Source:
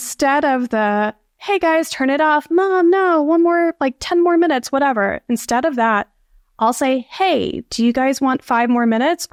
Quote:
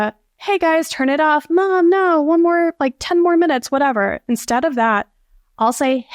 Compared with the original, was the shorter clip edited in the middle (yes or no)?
no